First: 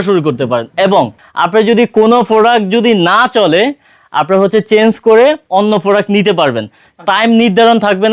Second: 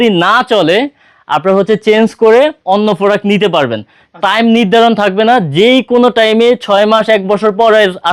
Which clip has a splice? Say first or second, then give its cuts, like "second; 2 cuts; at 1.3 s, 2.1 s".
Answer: first; 1 cut; at 1.2 s